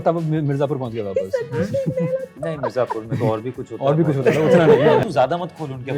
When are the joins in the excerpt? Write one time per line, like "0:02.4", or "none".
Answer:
0:05.0

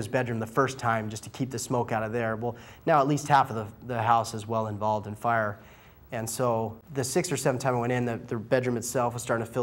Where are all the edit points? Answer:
0:06.8

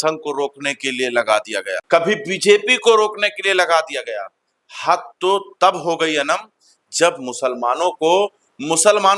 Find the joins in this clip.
none

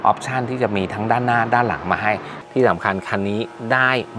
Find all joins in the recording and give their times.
0:02.4

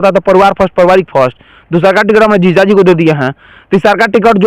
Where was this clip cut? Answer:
none

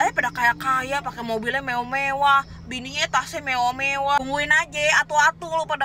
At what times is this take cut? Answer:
none

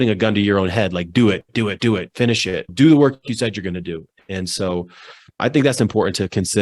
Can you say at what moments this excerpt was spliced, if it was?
0:02.7
0:05.4

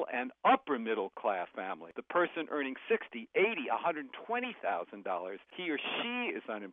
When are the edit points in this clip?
0:01.6
0:05.5

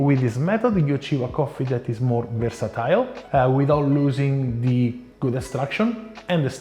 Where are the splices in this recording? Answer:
0:03.2
0:05.1

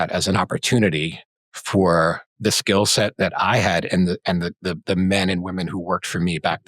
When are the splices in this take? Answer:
0:02.3

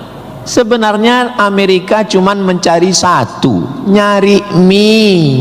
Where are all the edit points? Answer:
none

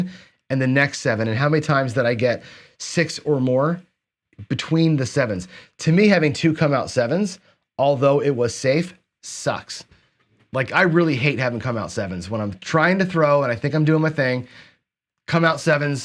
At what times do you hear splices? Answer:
none

